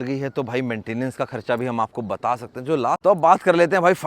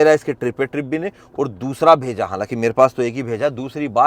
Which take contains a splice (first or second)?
first